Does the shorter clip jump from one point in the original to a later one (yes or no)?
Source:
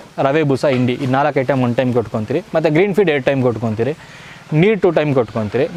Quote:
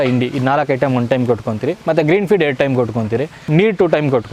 yes